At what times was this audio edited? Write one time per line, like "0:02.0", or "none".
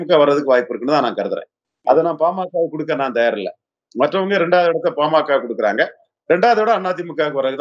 none